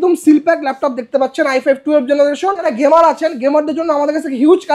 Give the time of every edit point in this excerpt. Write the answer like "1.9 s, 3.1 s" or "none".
2.7 s